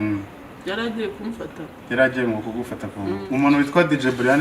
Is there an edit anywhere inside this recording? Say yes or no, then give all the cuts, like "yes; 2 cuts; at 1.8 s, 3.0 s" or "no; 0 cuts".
yes; 1 cut; at 3.1 s